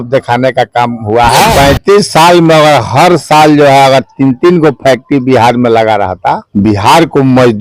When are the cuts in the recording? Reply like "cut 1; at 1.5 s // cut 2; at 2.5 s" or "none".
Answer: cut 1; at 1.5 s // cut 2; at 6.4 s